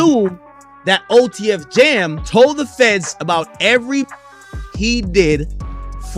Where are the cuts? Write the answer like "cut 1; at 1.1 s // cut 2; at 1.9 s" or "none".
cut 1; at 2.2 s